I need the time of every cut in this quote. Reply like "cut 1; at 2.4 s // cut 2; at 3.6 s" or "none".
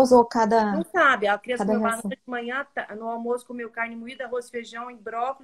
none

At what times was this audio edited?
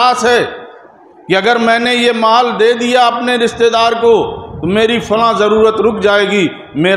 none

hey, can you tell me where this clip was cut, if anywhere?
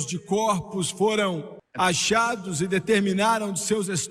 cut 1; at 1.6 s

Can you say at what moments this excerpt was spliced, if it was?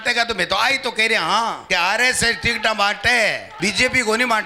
cut 1; at 1.6 s // cut 2; at 3.5 s

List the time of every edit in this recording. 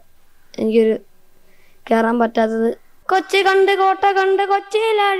cut 1; at 2.9 s

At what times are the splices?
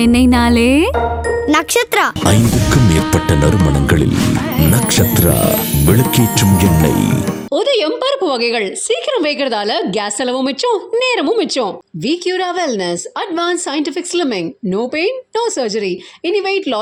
none

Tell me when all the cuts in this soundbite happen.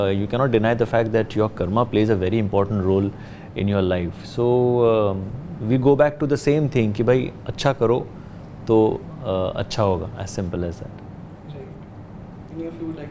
none

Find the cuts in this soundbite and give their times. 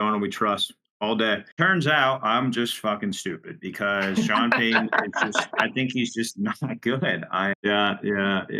cut 1; at 1.5 s // cut 2; at 7.5 s

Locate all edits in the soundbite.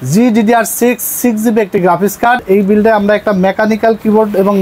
cut 1; at 2.4 s

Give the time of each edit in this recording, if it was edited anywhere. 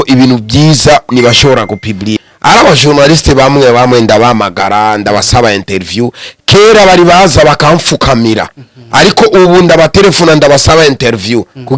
cut 1; at 2.2 s

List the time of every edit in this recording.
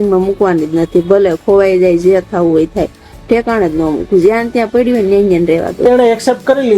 cut 1; at 5.8 s

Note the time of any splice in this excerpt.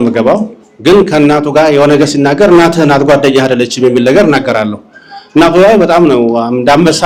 none

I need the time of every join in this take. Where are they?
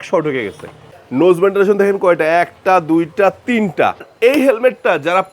cut 1; at 0.9 s // cut 2; at 4.1 s

